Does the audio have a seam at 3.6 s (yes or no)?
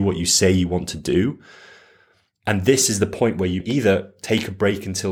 yes